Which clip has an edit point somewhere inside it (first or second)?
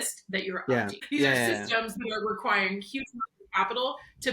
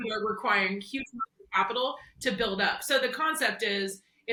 first